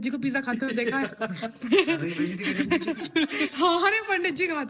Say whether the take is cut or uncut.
uncut